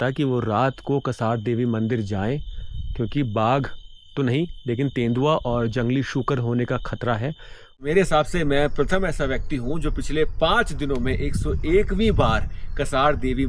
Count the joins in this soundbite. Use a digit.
1